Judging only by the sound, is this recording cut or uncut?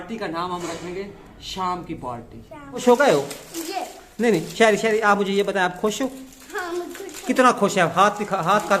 cut